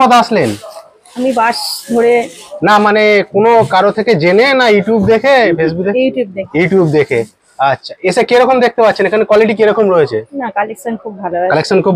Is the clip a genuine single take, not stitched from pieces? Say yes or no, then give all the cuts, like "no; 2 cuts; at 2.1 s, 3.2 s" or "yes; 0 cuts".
yes; 0 cuts